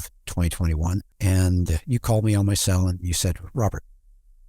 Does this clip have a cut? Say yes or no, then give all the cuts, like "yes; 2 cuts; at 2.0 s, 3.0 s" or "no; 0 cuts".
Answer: yes; 1 cut; at 1.1 s